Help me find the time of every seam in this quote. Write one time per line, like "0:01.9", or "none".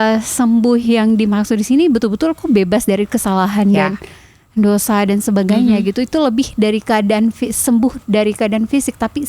none